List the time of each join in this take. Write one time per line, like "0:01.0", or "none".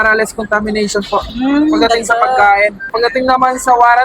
0:02.9